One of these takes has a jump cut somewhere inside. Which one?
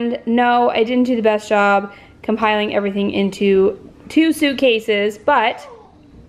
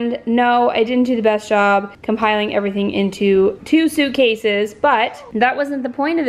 second; 3 cuts; at 1.9 s, 3.6 s, 5.2 s

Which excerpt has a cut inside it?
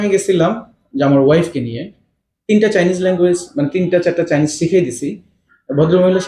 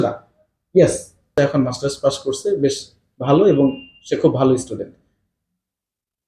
second; 1 cut; at 1.3 s

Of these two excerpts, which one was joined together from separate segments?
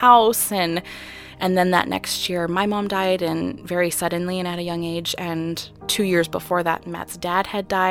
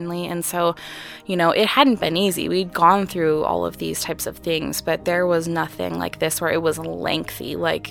first; 1 cut; at 5.7 s

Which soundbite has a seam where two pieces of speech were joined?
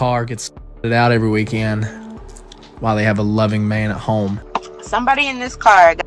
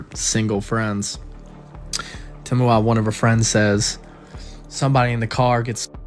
first; 1 cut; at 4.4 s

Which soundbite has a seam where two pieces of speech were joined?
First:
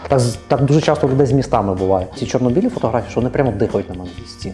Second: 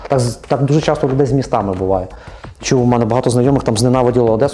first; 1 cut; at 2.2 s

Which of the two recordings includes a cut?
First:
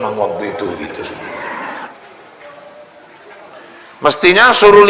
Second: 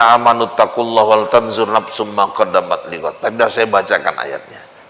first; 1 cut; at 1.9 s

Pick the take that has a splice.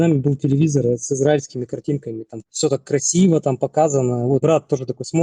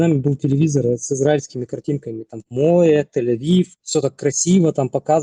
first; 1 cut; at 2.5 s

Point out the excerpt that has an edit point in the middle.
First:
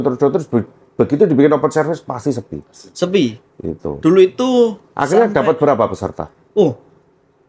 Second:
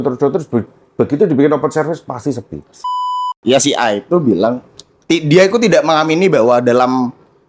second; 1 cut; at 3.0 s

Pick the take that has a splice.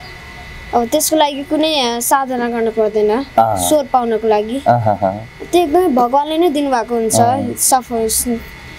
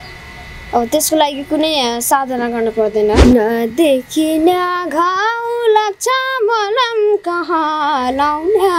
second; 1 cut; at 3.2 s

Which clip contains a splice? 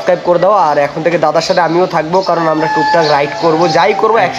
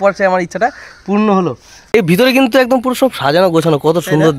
second; 1 cut; at 1.9 s

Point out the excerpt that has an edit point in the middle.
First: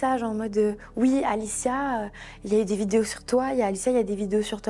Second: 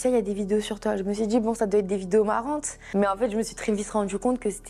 second; 1 cut; at 2.7 s

